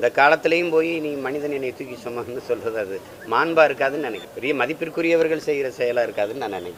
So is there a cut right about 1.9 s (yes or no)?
no